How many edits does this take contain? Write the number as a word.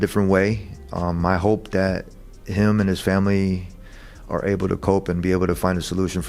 zero